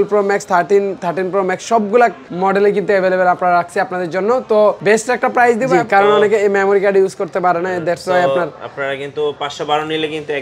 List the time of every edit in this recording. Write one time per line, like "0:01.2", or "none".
0:02.2
0:04.8
0:05.7